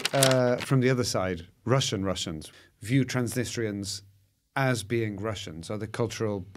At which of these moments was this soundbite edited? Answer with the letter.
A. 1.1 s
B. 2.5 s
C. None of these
B